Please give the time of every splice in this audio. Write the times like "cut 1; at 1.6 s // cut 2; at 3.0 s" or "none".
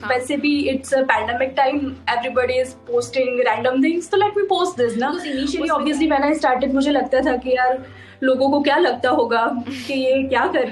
cut 1; at 5.3 s